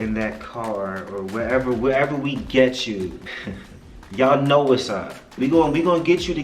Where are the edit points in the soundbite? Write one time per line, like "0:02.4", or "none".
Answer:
0:03.2
0:05.4